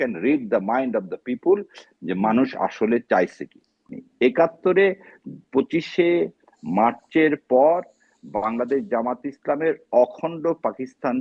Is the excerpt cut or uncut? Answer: cut